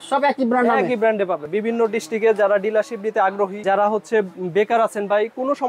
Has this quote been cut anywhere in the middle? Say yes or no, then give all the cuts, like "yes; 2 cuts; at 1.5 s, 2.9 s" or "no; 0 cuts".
yes; 2 cuts; at 1.5 s, 3.6 s